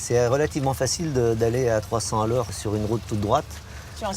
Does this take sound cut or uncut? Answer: cut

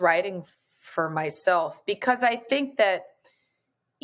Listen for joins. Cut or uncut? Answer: uncut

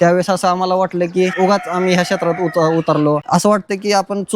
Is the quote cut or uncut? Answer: cut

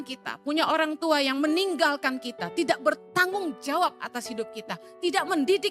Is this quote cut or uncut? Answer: uncut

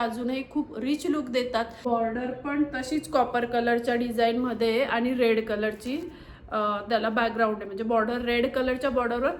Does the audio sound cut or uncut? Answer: cut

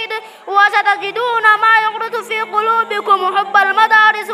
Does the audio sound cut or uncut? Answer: uncut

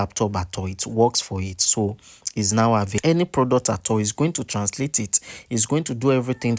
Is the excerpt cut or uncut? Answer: cut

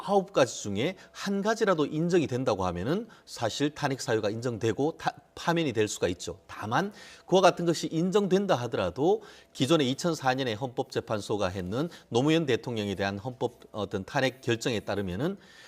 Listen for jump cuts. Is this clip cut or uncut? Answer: cut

